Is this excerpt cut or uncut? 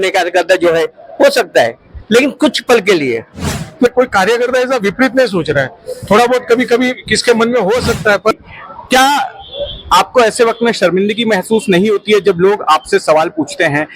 cut